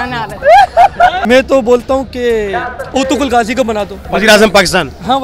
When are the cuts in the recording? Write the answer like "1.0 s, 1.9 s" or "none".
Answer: 1.2 s, 4.0 s

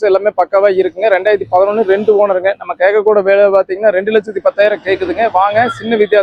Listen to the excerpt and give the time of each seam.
none

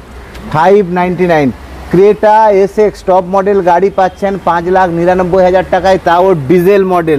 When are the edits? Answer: none

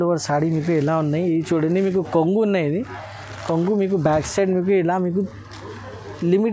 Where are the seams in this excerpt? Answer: none

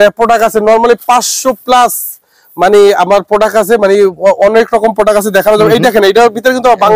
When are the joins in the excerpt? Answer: none

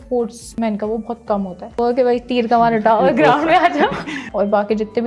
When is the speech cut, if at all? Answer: 1.8 s, 4.2 s

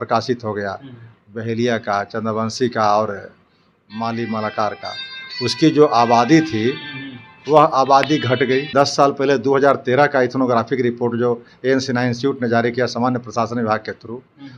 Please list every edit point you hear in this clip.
8.7 s

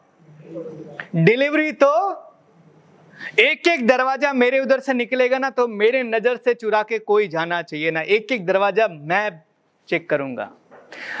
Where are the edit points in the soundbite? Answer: none

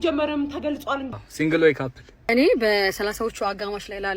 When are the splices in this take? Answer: 1.1 s, 2.3 s

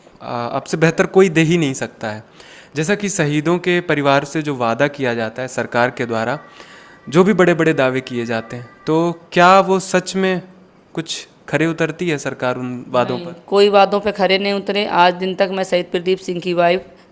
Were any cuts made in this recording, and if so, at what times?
none

